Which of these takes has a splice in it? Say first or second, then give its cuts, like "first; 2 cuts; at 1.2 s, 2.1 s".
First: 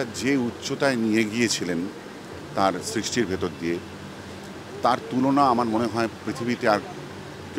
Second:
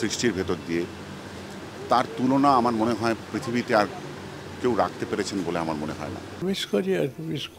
second; 1 cut; at 6.4 s